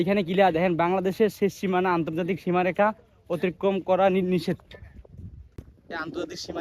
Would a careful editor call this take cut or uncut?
cut